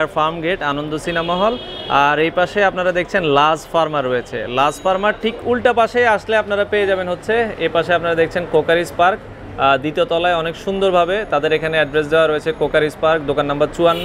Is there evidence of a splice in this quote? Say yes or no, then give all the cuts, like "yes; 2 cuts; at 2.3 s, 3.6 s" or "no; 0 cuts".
no; 0 cuts